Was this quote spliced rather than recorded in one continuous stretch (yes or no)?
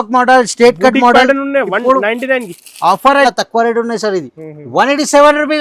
yes